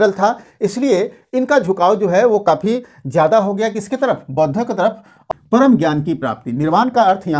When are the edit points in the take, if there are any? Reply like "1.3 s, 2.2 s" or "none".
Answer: 5.2 s

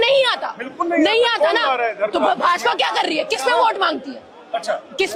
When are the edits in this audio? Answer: none

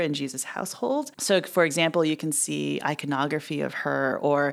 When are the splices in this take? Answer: 1.1 s

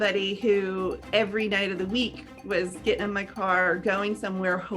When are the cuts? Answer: 1.0 s

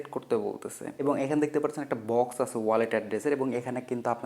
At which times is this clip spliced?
0.9 s

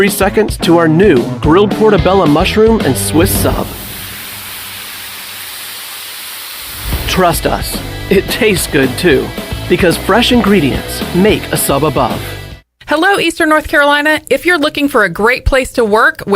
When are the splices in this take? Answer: 12.8 s

